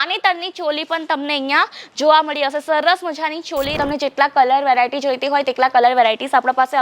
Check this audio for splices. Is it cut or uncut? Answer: cut